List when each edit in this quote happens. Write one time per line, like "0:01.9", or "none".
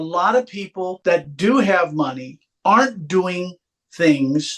0:00.9